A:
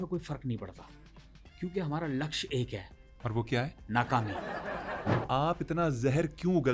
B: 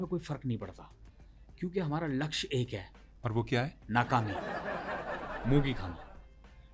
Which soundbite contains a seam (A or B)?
A